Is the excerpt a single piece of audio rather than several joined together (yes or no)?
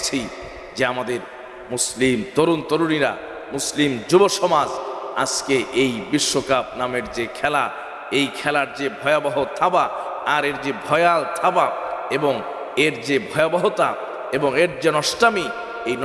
yes